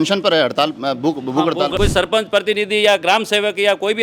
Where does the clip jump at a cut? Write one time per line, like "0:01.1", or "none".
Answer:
0:01.7